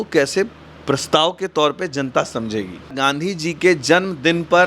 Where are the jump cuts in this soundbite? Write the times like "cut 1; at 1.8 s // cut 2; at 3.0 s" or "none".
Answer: cut 1; at 2.9 s